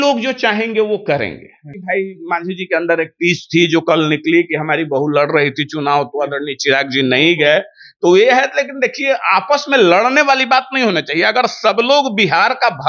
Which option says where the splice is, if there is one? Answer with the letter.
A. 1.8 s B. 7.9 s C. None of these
A